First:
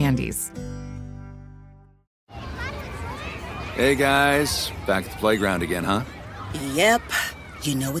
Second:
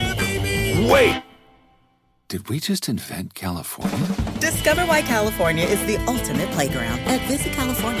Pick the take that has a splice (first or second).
first